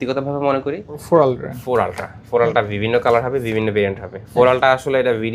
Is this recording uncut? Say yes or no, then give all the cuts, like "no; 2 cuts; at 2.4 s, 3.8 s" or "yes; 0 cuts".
no; 1 cut; at 1.0 s